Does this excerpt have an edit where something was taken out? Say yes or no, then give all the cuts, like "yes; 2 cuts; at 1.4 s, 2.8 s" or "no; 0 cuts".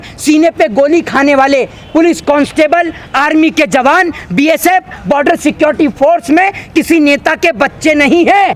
no; 0 cuts